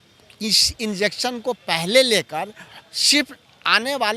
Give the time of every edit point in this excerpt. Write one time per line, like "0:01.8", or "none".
none